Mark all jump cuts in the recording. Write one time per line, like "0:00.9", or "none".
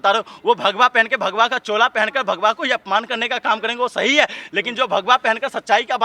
none